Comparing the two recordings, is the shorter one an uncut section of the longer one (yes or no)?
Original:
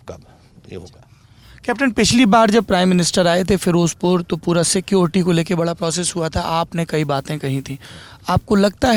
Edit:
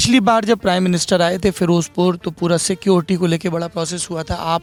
yes